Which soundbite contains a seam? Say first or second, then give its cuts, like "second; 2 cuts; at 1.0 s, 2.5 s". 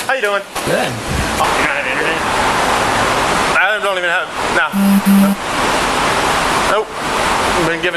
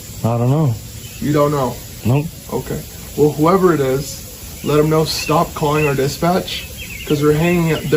first; 1 cut; at 1.4 s